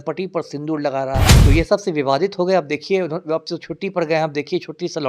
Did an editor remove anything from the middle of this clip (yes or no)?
yes